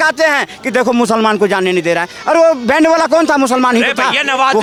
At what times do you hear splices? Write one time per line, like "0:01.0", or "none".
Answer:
none